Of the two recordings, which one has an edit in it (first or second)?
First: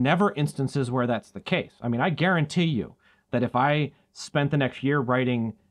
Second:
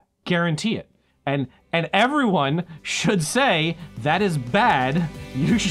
second